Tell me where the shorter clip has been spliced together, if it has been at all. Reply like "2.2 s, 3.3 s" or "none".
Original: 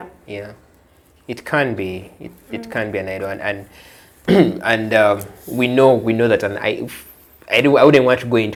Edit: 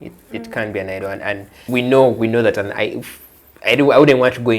1.5 s